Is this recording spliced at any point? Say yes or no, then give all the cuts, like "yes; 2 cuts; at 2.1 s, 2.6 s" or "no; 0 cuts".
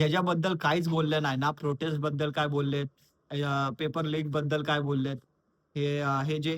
no; 0 cuts